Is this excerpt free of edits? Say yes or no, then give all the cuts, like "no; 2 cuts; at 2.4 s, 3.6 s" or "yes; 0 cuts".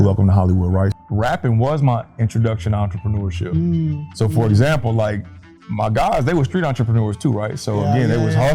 no; 1 cut; at 0.9 s